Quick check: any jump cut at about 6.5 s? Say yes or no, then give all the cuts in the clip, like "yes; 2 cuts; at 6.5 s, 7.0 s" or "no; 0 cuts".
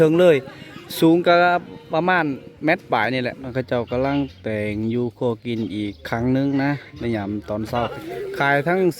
no; 2 cuts; at 3.5 s, 8.0 s